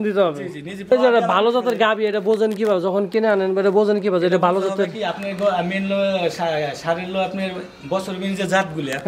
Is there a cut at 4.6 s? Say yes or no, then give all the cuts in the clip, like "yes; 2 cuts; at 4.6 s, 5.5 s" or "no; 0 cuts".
no; 1 cut; at 0.9 s